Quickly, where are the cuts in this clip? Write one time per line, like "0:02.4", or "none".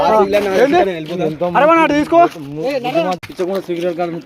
0:03.2